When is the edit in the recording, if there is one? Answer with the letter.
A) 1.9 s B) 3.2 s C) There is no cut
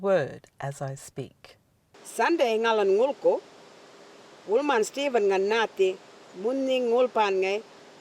A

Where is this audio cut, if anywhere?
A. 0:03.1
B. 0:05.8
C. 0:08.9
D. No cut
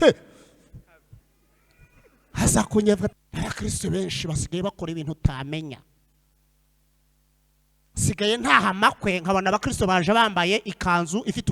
A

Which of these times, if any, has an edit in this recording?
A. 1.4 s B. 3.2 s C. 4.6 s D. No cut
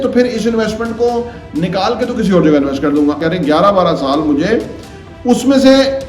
B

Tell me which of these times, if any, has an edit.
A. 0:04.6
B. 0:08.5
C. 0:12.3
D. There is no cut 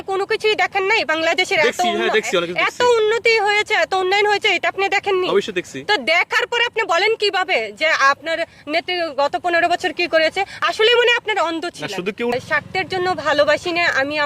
C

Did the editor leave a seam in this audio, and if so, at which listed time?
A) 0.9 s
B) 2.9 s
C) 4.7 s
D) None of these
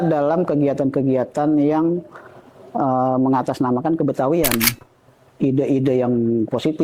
C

